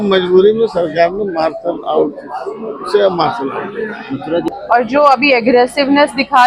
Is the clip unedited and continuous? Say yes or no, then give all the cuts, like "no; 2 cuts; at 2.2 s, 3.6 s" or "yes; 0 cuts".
no; 1 cut; at 4.5 s